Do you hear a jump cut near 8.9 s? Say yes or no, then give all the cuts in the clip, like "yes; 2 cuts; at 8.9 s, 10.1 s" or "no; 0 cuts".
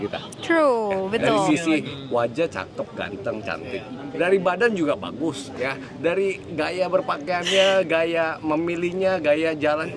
no; 1 cut; at 1.5 s